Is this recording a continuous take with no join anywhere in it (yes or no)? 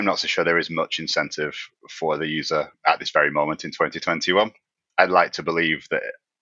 no